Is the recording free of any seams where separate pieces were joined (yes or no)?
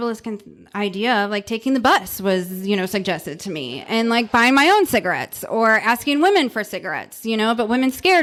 yes